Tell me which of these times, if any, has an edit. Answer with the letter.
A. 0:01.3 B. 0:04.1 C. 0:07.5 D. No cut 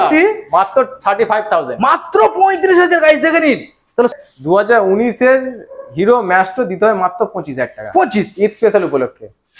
B